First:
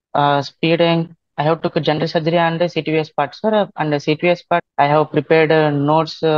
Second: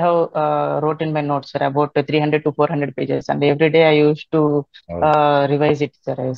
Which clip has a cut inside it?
first; 2 cuts; at 1.3 s, 4.6 s

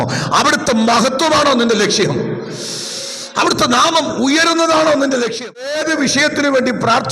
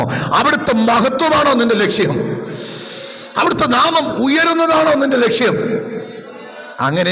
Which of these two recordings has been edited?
first; 1 cut; at 5.7 s

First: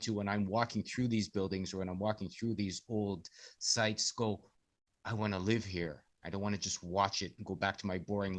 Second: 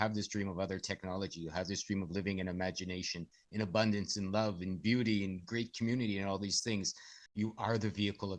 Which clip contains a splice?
second; 1 cut; at 7.3 s

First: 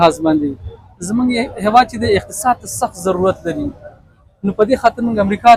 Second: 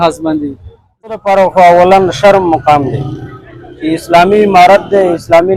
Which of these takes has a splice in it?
second; 1 cut; at 1.2 s

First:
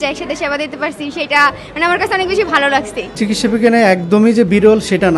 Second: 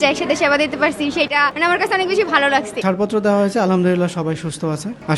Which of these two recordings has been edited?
second; 2 cuts; at 1.3 s, 2.8 s

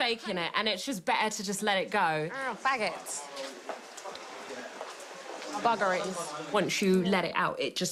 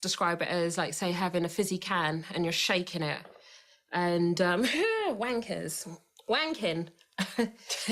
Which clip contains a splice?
second; 1 cut; at 7.0 s

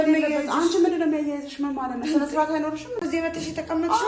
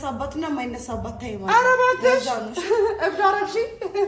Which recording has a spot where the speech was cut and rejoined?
first; 1 cut; at 3.0 s

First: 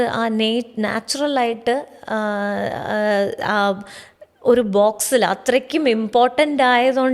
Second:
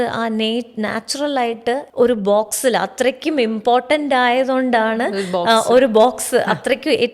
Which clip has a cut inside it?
second; 1 cut; at 1.9 s

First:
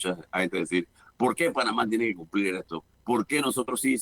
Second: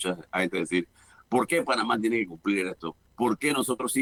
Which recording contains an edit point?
first; 1 cut; at 1.0 s

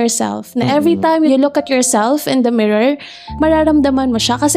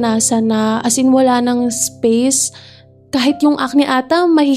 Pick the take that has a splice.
first; 2 cuts; at 1.3 s, 3.3 s

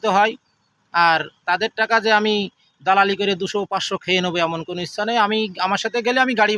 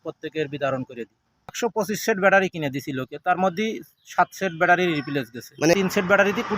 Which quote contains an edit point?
second; 2 cuts; at 1.6 s, 5.7 s

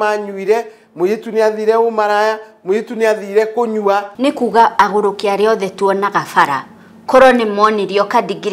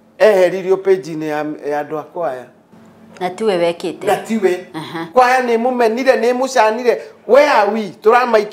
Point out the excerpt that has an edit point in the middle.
first; 1 cut; at 4.1 s

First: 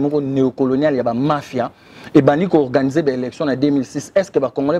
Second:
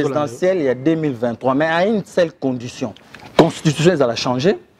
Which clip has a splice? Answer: second; 1 cut; at 2.9 s

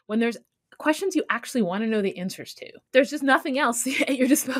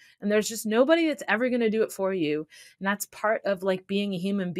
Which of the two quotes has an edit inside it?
first; 1 cut; at 2.8 s

